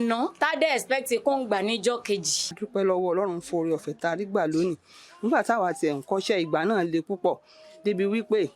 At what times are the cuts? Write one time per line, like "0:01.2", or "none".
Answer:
0:02.4